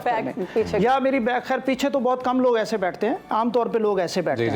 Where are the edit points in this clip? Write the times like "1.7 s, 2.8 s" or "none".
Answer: none